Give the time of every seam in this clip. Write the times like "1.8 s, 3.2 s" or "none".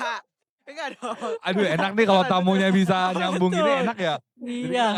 none